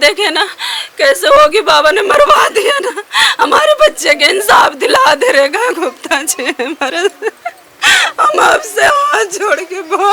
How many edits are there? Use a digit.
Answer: 0